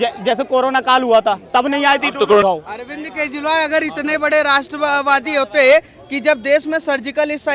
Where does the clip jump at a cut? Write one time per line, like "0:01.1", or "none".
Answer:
0:02.4

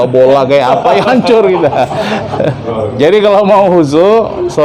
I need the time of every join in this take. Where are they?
0:02.7

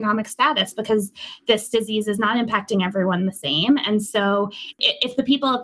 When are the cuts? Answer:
0:04.7

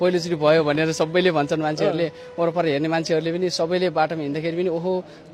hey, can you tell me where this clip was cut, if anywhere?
none

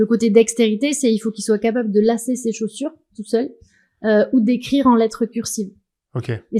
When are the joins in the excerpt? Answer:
none

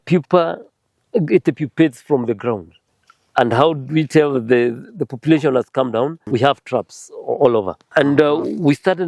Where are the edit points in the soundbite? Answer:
0:02.7
0:06.2
0:07.9

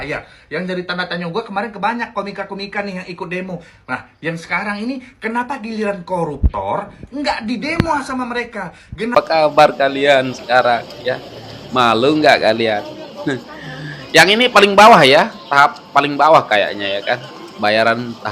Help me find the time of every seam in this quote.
0:09.1

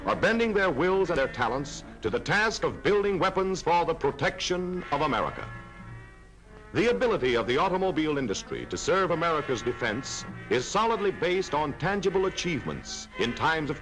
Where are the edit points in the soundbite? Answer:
none

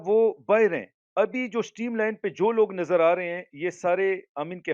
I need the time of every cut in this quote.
0:01.0

